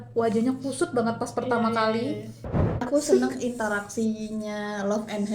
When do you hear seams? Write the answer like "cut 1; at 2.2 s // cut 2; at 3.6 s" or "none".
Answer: cut 1; at 2.8 s